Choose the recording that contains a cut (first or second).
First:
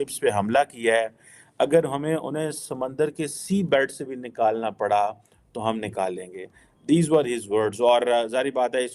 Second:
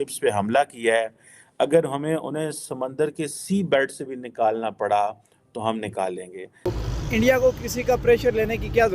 second